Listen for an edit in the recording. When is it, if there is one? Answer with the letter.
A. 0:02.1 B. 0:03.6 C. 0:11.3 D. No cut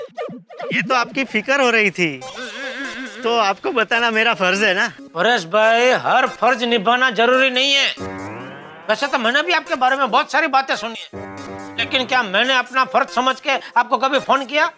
D